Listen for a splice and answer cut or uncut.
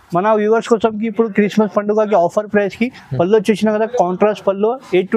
uncut